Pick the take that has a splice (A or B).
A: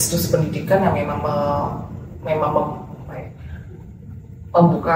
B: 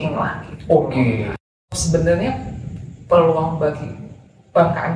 B